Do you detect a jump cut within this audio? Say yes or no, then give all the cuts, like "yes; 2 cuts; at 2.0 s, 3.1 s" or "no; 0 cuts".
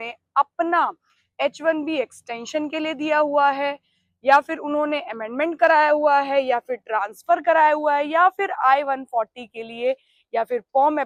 no; 0 cuts